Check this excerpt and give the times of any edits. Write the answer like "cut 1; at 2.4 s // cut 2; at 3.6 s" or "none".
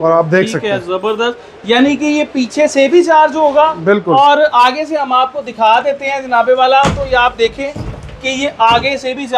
none